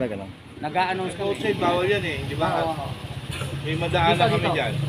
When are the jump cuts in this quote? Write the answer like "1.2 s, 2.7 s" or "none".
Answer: 1.2 s